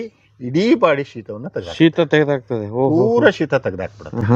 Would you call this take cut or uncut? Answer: uncut